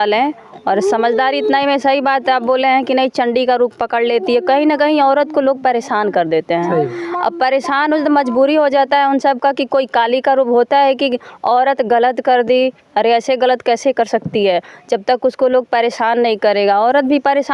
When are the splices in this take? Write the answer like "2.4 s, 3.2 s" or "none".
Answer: none